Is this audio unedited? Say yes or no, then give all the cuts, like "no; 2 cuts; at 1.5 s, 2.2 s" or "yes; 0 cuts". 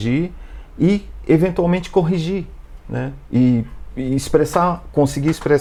yes; 0 cuts